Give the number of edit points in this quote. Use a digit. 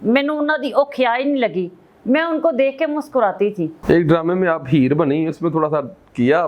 1